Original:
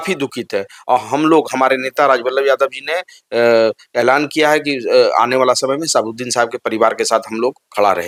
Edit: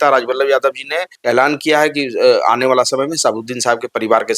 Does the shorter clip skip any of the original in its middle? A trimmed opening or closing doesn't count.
yes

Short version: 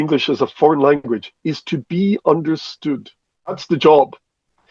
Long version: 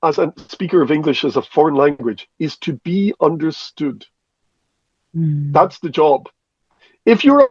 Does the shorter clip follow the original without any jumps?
no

